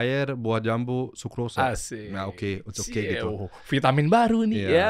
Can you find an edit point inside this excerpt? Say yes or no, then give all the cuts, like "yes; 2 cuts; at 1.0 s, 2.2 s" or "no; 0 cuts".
no; 0 cuts